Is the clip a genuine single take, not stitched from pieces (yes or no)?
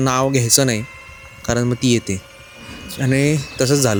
yes